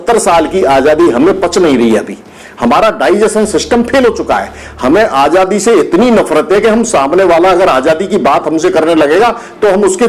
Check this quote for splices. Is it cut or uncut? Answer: uncut